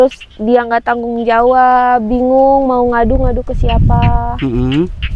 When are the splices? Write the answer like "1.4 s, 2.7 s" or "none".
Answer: none